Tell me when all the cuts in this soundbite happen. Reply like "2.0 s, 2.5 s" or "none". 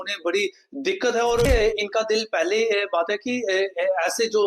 1.5 s